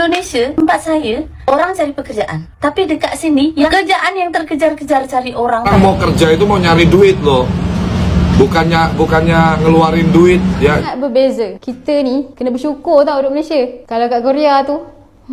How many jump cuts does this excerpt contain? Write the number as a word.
three